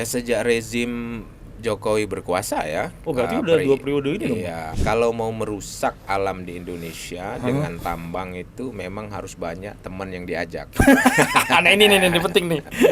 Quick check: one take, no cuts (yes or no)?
no